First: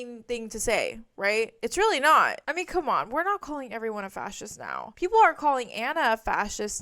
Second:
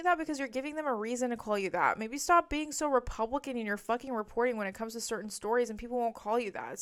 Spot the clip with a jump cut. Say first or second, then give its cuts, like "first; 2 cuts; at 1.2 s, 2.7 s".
first; 1 cut; at 2.4 s